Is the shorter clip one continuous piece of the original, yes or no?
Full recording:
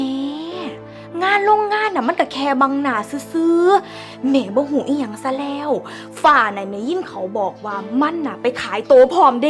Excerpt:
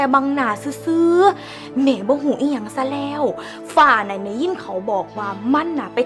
yes